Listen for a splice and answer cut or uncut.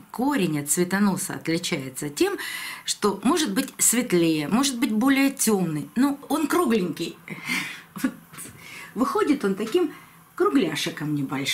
cut